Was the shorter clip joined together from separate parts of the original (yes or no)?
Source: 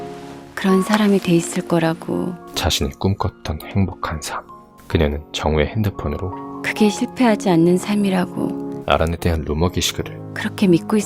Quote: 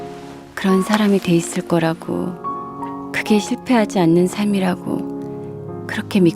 yes